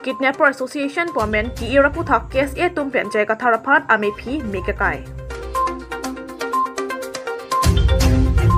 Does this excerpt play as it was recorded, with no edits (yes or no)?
yes